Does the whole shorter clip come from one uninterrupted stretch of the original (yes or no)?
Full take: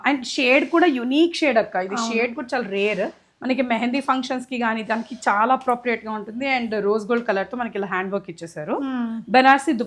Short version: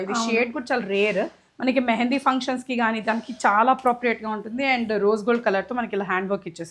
yes